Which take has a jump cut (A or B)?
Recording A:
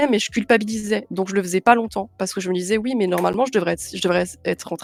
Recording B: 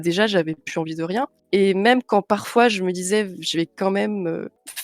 B